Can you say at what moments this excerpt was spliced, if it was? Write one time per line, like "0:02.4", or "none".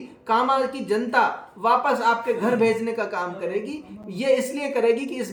none